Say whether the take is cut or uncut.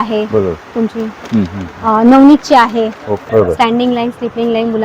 cut